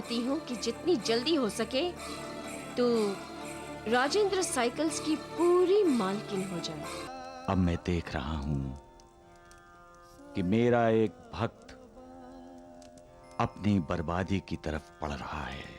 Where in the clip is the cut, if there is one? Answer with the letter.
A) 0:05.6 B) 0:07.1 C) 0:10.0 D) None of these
B